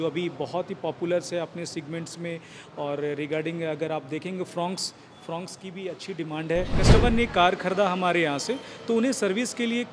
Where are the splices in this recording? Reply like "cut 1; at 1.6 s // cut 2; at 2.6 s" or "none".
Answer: cut 1; at 6.8 s